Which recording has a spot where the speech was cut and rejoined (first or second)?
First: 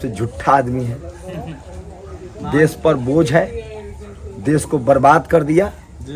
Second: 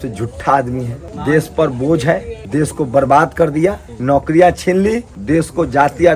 second